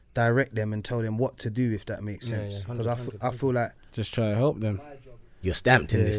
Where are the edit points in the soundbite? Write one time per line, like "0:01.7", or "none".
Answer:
0:04.7